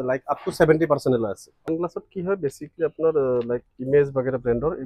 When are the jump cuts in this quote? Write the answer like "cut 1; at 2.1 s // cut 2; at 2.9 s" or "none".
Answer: cut 1; at 1.5 s